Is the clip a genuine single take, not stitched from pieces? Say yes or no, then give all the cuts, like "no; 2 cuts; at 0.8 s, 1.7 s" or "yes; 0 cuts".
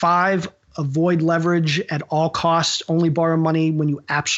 yes; 0 cuts